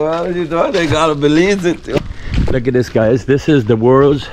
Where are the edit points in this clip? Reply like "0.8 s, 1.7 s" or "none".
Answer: 2.0 s

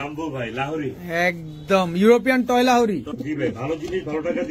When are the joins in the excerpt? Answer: 3.2 s

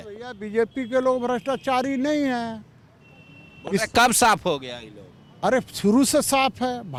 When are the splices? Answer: none

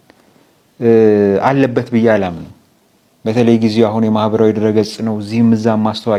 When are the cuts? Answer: none

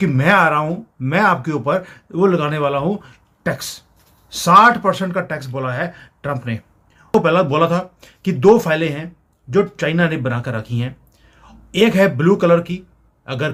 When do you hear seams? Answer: none

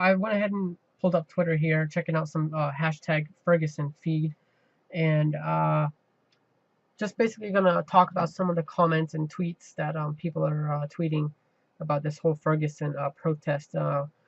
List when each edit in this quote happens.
3.9 s

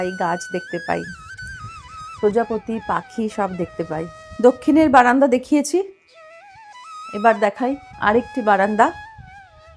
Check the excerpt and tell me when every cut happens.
4.2 s

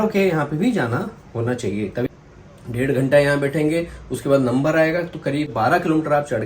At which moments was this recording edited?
2.1 s, 5.5 s

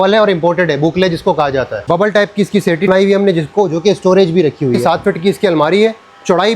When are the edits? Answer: 1.8 s, 2.9 s, 4.8 s

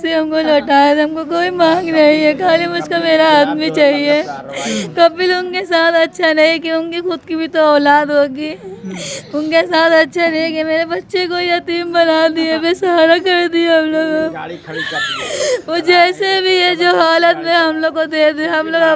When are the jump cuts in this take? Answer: none

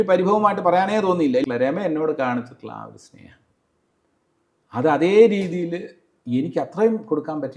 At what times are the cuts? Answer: 1.4 s

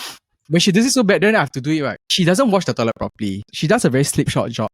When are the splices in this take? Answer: 2.0 s, 3.4 s

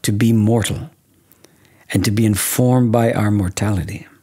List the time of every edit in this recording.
none

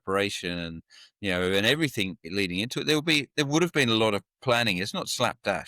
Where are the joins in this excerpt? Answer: none

